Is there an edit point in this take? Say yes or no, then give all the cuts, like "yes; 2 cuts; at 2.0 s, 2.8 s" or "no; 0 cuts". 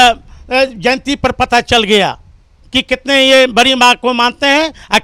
no; 0 cuts